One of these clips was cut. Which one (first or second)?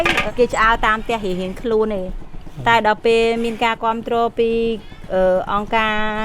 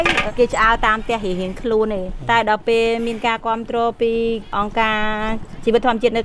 second